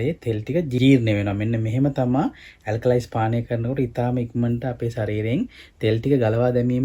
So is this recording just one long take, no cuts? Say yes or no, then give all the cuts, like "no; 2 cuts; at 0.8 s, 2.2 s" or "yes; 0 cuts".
yes; 0 cuts